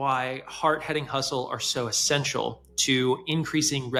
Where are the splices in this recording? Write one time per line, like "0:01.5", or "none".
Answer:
none